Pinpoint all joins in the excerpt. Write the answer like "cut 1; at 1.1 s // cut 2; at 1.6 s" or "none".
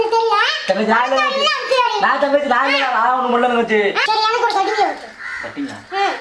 cut 1; at 4.0 s